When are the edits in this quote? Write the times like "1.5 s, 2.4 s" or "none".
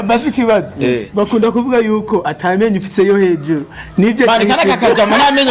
none